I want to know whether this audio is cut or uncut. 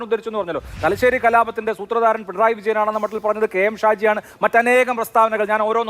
uncut